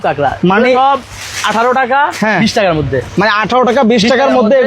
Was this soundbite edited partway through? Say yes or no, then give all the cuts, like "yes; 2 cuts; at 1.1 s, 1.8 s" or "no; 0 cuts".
no; 0 cuts